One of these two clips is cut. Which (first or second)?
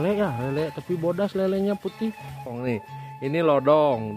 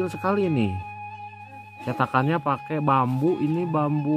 first